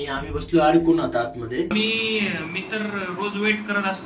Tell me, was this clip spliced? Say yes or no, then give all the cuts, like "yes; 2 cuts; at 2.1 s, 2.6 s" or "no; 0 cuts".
yes; 1 cut; at 1.7 s